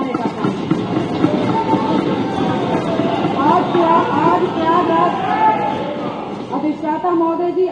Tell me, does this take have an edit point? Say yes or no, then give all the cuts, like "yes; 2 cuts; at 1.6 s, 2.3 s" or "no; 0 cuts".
no; 0 cuts